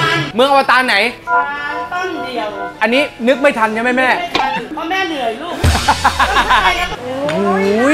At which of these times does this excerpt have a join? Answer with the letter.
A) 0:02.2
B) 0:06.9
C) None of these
B